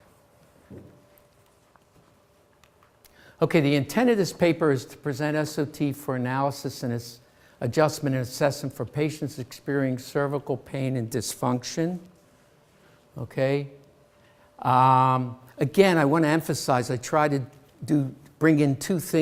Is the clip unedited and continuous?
yes; 0 cuts

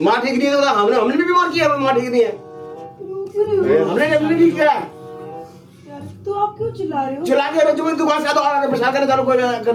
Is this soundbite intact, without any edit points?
yes; 0 cuts

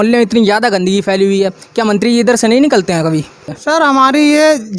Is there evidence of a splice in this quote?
yes; 1 cut; at 3.5 s

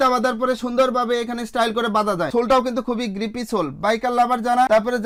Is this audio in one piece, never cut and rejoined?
yes; 0 cuts

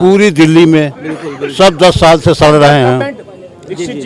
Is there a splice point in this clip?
no; 0 cuts

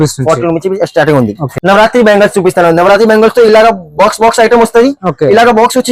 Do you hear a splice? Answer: yes; 1 cut; at 1.5 s

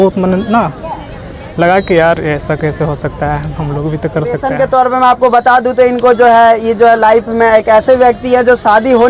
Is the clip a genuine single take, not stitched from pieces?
no; 1 cut; at 4.5 s

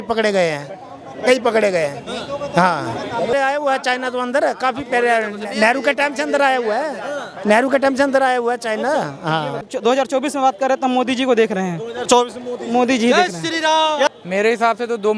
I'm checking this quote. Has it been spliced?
yes; 3 cuts; at 3.3 s, 9.7 s, 14.1 s

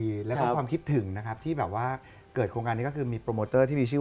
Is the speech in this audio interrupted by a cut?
no; 0 cuts

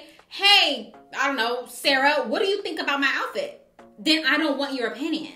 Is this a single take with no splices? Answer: yes; 0 cuts

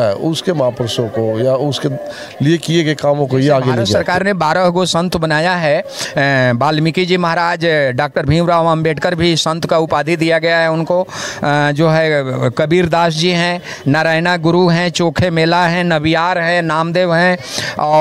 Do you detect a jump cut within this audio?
yes; 1 cut; at 4.0 s

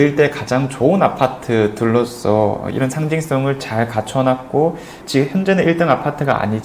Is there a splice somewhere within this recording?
no; 0 cuts

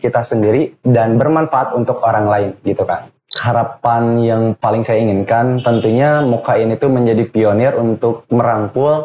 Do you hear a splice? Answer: yes; 2 cuts; at 3.3 s, 4.6 s

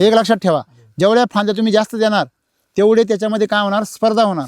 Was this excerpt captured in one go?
yes; 0 cuts

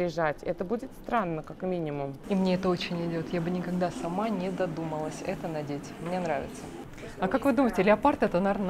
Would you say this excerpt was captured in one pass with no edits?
no; 2 cuts; at 2.2 s, 6.9 s

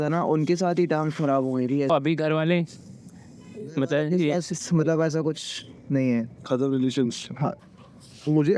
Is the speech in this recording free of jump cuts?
no; 2 cuts; at 1.9 s, 7.6 s

